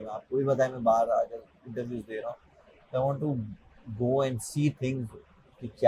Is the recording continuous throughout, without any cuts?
yes; 0 cuts

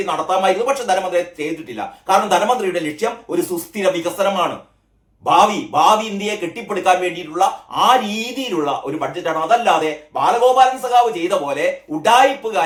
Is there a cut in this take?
no; 0 cuts

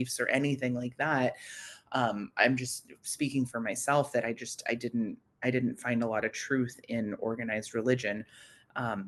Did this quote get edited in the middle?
no; 0 cuts

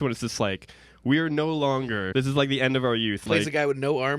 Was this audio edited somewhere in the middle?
yes; 2 cuts; at 2.1 s, 3.2 s

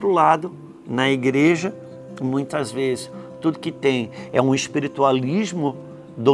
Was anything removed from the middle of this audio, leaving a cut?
no; 0 cuts

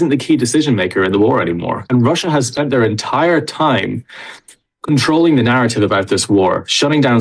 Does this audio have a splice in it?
yes; 1 cut; at 1.9 s

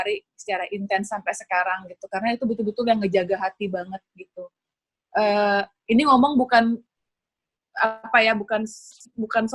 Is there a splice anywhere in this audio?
no; 0 cuts

